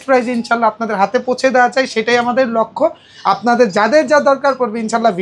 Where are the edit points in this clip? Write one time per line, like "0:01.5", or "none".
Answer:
none